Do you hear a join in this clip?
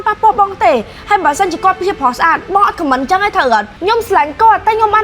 yes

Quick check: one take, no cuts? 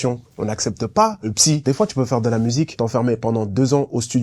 no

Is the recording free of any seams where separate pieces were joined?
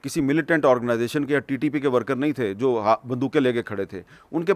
yes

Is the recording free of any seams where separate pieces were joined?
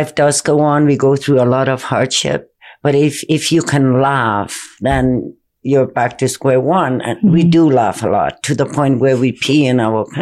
yes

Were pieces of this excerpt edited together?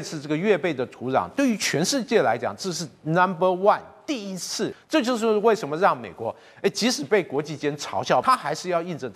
yes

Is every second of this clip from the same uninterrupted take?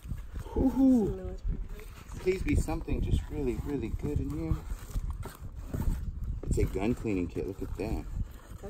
yes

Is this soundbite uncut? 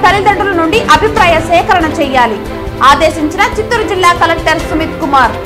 yes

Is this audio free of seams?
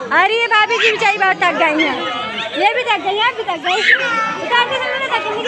yes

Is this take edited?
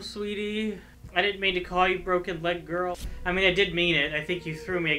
yes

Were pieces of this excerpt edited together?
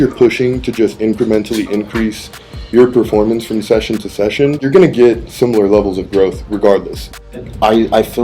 yes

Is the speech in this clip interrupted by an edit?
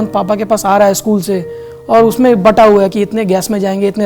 no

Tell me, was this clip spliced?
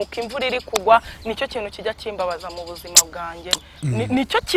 no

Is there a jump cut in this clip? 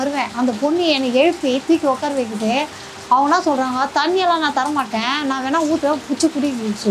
no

